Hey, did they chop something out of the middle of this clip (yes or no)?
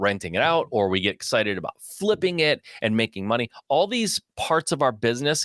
no